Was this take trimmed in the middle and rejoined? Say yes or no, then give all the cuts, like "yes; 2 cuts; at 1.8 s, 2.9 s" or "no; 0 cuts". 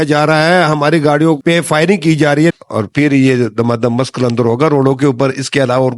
yes; 1 cut; at 2.5 s